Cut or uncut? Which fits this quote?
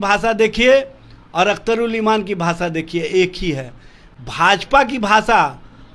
uncut